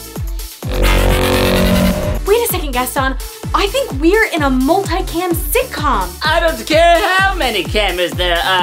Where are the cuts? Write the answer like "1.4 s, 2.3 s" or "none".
2.1 s